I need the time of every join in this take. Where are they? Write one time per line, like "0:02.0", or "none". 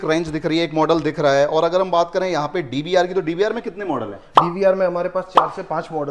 none